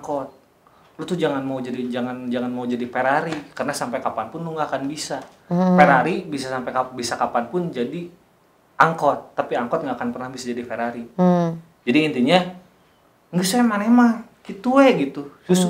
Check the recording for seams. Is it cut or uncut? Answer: uncut